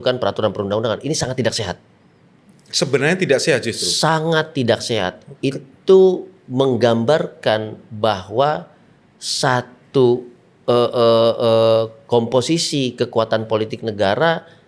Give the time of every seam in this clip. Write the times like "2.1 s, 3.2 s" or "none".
none